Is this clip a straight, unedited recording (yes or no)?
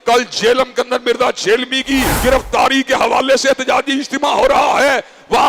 no